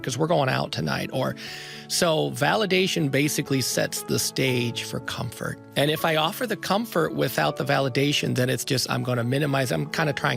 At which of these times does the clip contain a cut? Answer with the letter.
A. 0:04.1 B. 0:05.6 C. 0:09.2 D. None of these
B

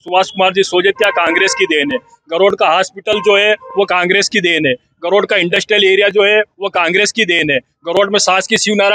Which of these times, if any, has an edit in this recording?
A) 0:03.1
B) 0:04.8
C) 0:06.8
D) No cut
D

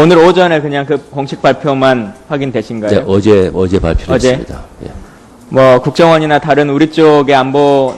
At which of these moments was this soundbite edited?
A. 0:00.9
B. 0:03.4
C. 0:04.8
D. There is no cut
C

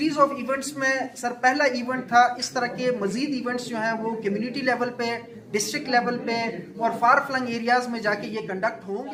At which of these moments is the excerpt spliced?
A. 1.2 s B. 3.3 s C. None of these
C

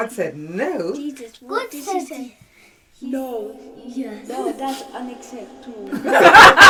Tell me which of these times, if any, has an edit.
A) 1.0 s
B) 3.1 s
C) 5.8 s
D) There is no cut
D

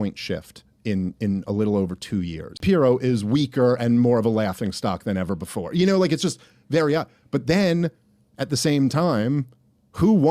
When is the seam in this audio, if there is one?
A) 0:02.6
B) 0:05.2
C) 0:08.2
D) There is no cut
A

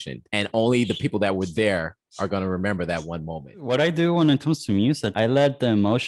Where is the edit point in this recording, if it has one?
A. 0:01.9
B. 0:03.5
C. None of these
B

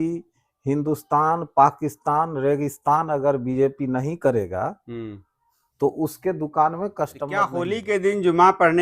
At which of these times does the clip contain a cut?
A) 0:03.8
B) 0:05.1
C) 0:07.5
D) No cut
C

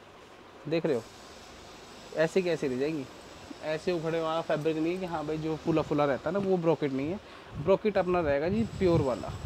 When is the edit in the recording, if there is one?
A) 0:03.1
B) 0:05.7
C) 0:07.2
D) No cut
D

